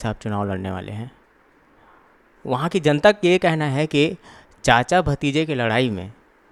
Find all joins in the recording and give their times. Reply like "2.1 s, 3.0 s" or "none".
none